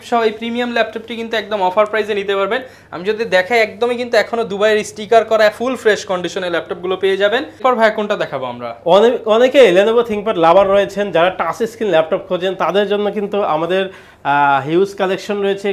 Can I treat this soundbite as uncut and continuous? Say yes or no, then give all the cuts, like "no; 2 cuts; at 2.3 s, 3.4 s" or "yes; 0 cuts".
yes; 0 cuts